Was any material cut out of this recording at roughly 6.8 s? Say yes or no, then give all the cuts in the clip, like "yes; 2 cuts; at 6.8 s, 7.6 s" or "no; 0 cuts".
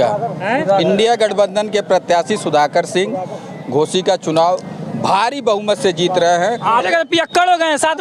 yes; 1 cut; at 6.8 s